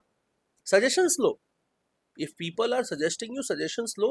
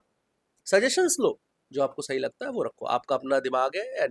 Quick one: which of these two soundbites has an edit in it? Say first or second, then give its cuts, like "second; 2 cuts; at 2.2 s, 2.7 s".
second; 1 cut; at 1.6 s